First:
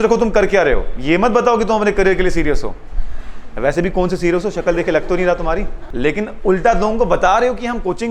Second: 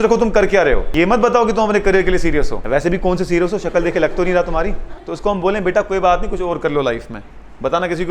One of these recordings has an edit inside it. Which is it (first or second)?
second